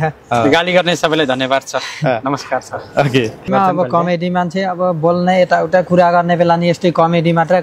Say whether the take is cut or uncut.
cut